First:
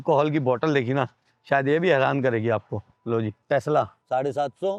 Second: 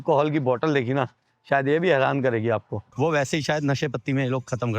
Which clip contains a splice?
second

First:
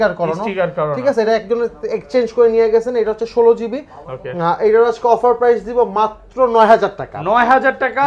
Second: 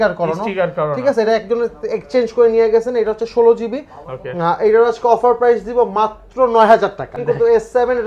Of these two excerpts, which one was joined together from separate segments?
second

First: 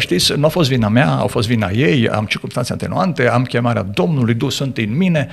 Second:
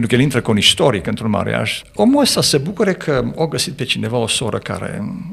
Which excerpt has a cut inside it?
second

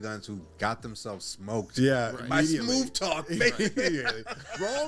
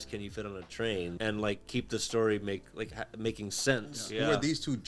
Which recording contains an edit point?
second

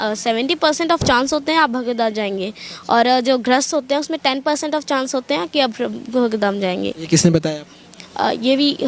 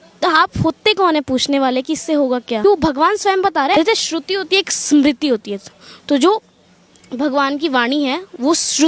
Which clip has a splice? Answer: second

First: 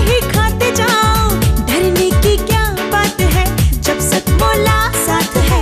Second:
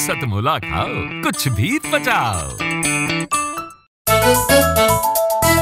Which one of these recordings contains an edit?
second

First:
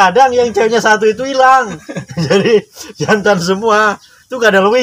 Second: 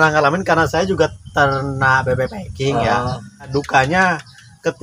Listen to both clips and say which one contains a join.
second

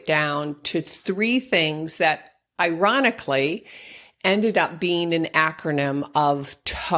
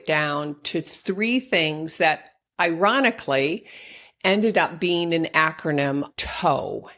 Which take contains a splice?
second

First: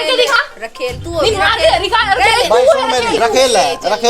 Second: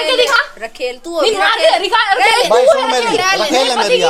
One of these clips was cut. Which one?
first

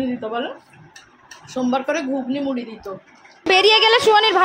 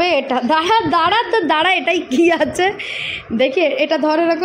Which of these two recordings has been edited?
first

